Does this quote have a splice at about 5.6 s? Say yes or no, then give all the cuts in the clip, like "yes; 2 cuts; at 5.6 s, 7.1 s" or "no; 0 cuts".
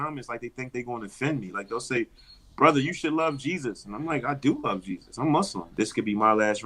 yes; 1 cut; at 5.6 s